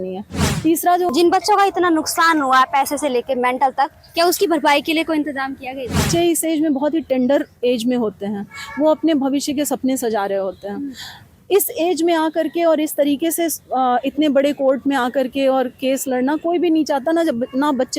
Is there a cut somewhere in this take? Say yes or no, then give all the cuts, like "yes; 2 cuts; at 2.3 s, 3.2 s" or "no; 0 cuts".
yes; 2 cuts; at 1.1 s, 6.1 s